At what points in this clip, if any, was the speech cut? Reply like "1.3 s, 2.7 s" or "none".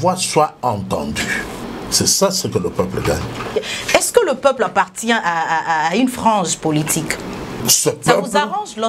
1.6 s, 3.5 s, 7.6 s